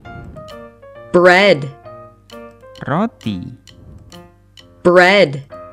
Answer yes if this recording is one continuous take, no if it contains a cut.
yes